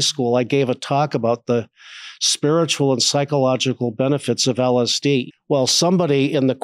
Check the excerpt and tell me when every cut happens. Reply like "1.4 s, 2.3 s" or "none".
5.2 s

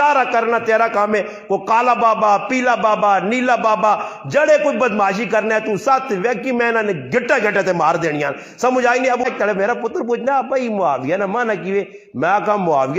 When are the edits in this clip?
9.3 s

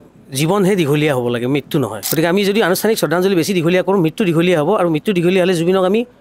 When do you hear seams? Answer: 2.0 s

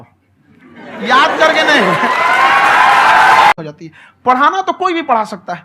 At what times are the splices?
3.5 s

